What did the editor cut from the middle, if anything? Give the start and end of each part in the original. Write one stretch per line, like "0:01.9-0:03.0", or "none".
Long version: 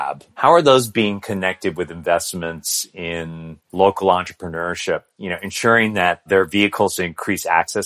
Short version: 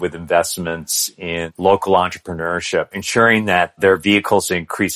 0:03.3-0:03.6
0:05.1-0:05.5